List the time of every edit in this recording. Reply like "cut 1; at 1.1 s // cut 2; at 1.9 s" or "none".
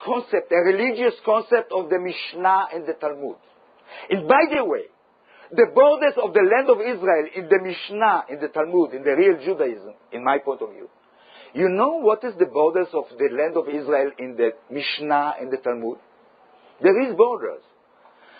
cut 1; at 1.2 s

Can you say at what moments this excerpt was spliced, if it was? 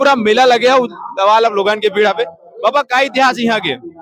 none

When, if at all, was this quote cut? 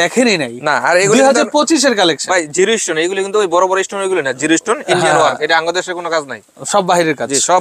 none

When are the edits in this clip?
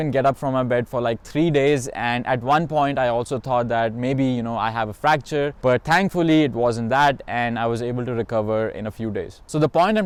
none

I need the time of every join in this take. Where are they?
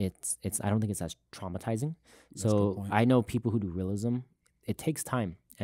none

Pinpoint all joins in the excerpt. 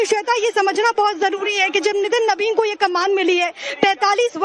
cut 1; at 1.6 s

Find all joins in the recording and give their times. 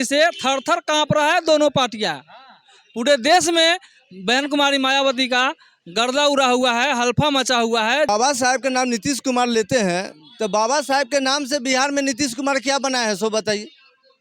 cut 1; at 8.1 s

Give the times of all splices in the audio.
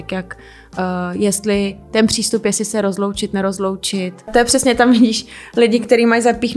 cut 1; at 4.3 s

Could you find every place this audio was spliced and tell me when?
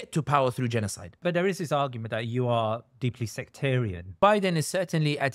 cut 1; at 1.2 s // cut 2; at 4.2 s

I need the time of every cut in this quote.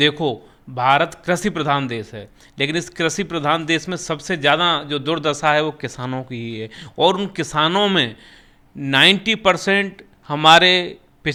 none

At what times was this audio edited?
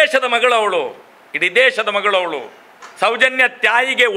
cut 1; at 2.8 s

